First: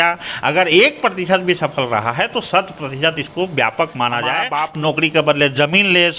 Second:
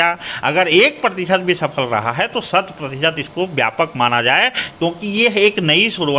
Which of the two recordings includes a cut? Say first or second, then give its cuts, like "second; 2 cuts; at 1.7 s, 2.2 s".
first; 1 cut; at 4.6 s